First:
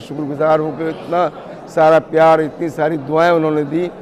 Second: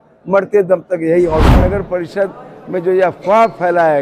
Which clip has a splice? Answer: second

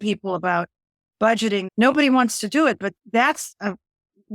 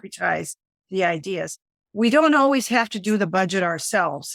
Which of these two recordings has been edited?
first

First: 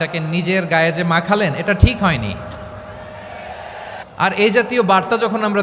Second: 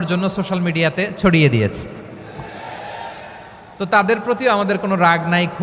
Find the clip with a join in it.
first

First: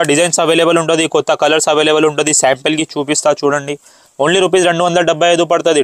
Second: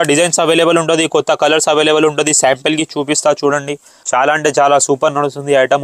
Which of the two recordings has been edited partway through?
second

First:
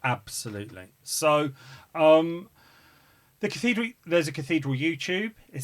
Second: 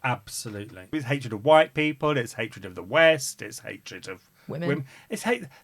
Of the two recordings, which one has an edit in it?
second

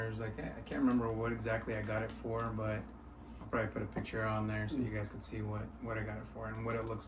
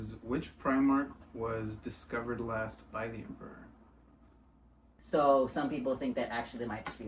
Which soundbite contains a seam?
second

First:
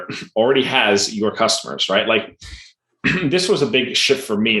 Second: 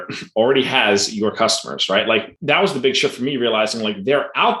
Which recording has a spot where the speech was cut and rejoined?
second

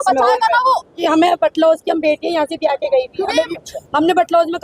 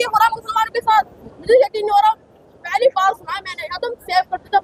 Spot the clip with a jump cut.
first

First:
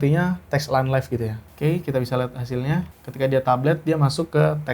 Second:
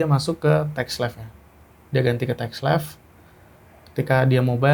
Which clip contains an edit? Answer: first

